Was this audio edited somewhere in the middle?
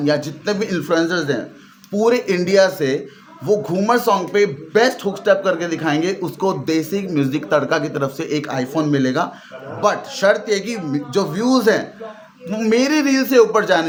no; 0 cuts

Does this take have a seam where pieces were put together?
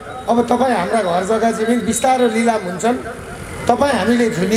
no; 0 cuts

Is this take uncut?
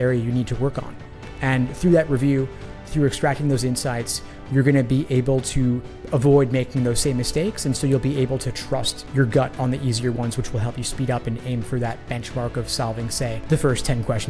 no; 1 cut; at 13.4 s

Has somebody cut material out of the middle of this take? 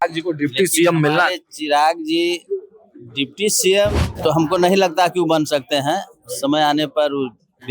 yes; 1 cut; at 4.1 s

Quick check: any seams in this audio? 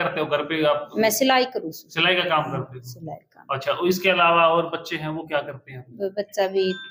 no; 0 cuts

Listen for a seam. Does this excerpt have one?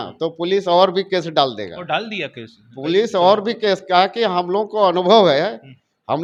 no; 0 cuts

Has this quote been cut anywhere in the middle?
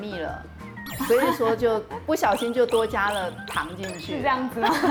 no; 0 cuts

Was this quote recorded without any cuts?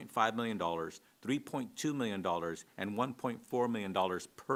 yes; 0 cuts

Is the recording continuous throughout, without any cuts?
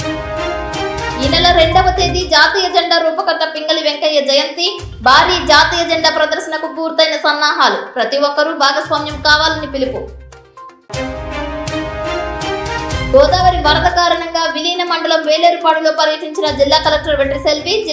no; 1 cut; at 1.0 s

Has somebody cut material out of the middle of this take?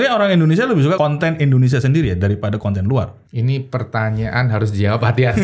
yes; 2 cuts; at 1.0 s, 3.2 s

